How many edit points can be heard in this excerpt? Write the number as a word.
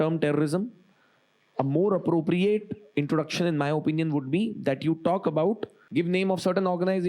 one